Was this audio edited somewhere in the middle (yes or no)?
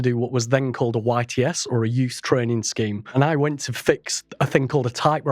yes